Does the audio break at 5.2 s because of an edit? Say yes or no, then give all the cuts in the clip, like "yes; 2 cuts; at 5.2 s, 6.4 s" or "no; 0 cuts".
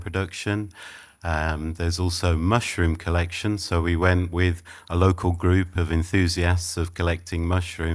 no; 0 cuts